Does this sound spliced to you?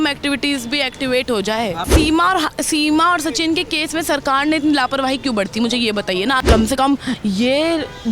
yes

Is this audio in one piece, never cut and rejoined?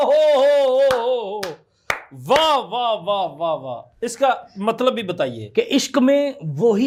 yes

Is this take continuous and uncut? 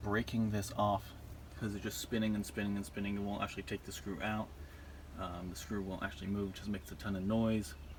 yes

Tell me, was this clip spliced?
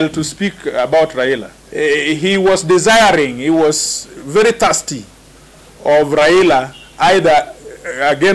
yes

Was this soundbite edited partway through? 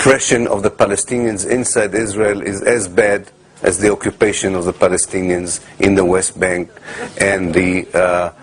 yes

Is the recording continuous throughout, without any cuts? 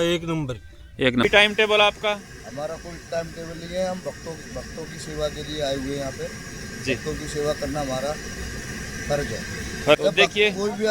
no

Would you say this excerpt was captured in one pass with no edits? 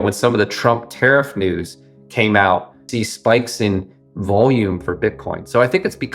no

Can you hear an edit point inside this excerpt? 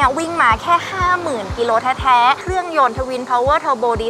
yes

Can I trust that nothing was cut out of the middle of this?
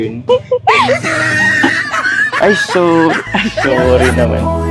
yes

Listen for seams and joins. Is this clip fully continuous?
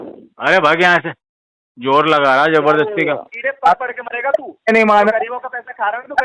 no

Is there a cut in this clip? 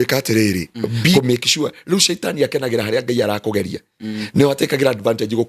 yes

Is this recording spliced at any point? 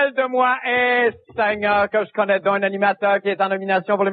yes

